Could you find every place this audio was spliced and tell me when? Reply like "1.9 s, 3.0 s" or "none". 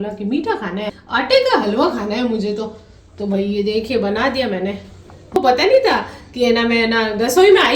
1.0 s, 5.4 s